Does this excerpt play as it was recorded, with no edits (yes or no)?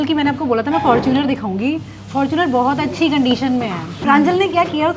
no